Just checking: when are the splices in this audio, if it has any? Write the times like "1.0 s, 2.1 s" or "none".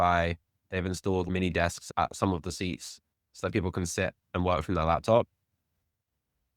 1.3 s